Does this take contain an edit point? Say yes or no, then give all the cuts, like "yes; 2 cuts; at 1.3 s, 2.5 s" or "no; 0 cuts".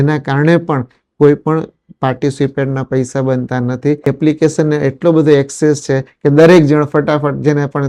yes; 1 cut; at 4.0 s